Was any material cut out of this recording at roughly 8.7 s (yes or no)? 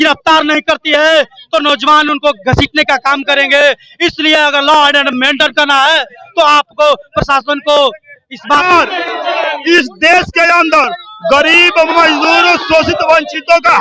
yes